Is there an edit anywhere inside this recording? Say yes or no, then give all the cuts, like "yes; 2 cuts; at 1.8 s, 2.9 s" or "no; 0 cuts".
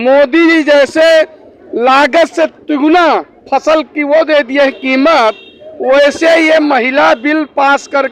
no; 0 cuts